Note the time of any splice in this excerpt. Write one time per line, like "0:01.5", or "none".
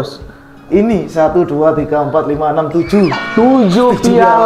none